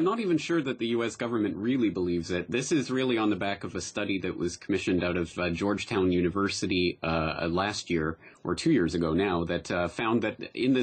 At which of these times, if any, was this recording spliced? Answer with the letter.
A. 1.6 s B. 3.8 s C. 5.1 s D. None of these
C